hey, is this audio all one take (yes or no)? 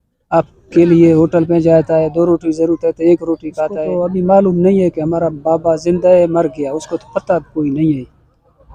no